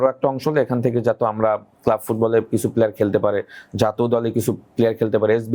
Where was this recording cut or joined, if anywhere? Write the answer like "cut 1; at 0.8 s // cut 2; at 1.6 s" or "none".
none